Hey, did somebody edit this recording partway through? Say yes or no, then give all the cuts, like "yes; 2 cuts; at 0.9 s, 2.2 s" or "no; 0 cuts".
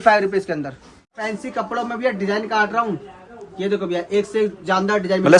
yes; 1 cut; at 1.2 s